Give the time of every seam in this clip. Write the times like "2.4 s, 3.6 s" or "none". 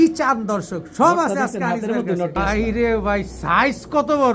2.4 s